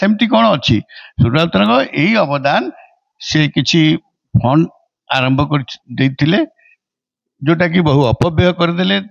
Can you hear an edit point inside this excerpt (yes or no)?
no